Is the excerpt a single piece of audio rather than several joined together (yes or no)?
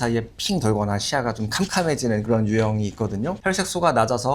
no